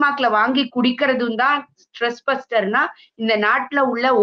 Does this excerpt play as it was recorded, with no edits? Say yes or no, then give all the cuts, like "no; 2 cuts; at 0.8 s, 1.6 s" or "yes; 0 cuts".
yes; 0 cuts